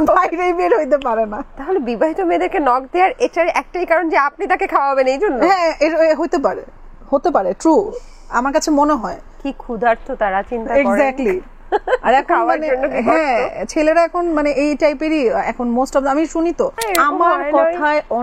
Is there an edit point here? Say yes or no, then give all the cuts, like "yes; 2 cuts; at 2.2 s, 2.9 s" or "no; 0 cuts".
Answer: yes; 1 cut; at 16.8 s